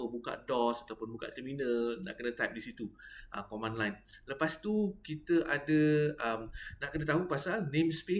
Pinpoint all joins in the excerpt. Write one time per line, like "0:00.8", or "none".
none